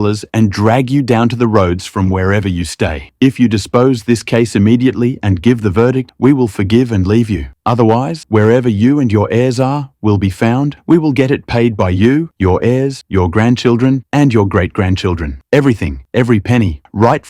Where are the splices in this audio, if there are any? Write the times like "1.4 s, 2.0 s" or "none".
3.1 s